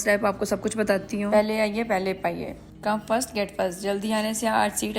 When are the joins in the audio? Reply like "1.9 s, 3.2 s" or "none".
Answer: none

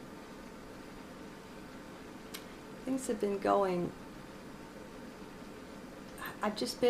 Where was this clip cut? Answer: none

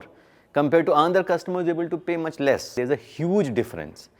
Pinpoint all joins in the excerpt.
2.7 s

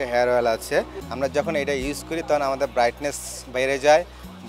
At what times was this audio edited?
1.0 s

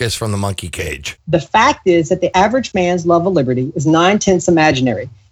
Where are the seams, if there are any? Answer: 1.1 s, 2.3 s

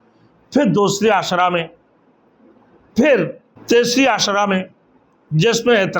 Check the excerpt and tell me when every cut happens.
3.5 s

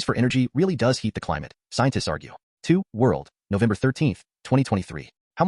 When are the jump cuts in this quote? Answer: 2.5 s

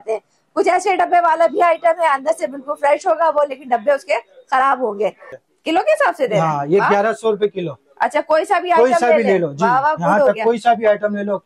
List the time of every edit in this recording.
5.3 s

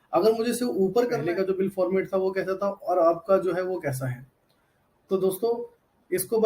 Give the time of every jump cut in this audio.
1.2 s

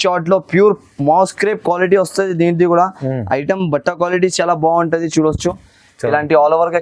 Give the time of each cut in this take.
none

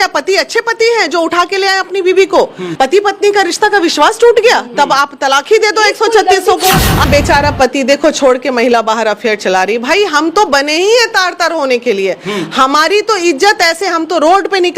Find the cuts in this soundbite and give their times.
2.6 s, 7.0 s

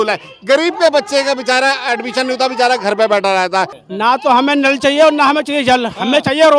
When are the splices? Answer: 3.8 s

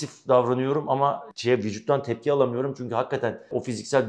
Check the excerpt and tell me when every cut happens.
none

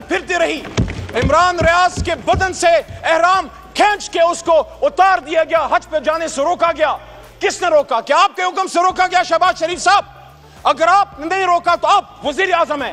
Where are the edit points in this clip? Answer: none

